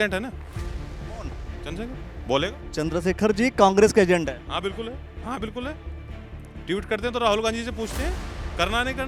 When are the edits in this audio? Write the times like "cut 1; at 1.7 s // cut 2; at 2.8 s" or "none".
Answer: none